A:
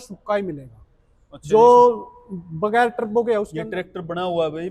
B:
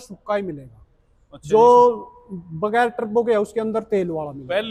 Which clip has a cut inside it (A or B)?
A